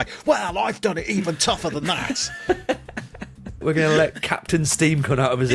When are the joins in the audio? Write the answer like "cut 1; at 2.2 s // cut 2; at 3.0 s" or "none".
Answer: cut 1; at 3.6 s